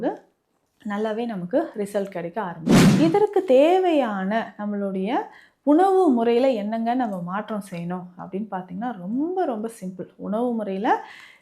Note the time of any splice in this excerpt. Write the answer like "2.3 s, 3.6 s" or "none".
2.6 s